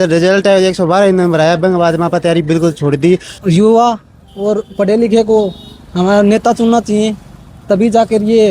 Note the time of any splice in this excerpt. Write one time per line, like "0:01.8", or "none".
0:03.3

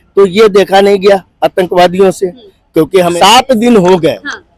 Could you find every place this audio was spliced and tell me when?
0:03.1

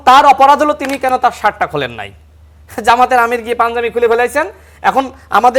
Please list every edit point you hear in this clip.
none

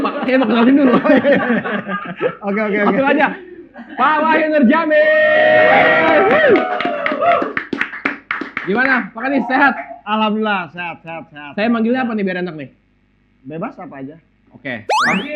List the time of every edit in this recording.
none

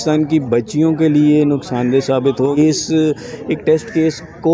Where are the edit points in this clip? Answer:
0:02.6

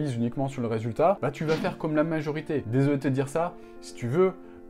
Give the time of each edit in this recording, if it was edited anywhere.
0:02.7

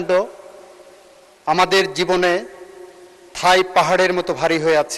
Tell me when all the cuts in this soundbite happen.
none

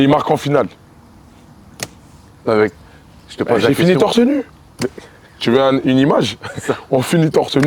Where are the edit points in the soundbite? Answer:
0:05.4

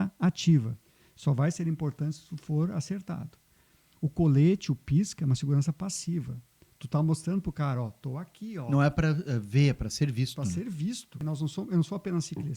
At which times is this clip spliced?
0:11.2

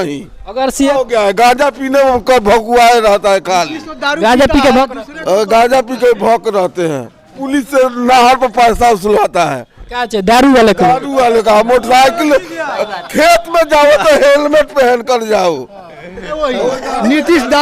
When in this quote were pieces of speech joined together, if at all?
0:00.9
0:07.3
0:16.3

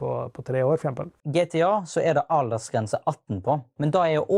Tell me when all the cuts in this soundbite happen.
0:01.1

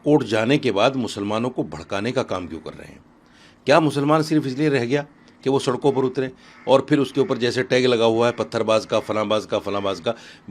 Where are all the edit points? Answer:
none

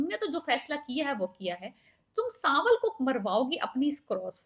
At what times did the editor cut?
none

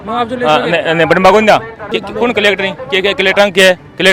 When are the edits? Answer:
0:01.9

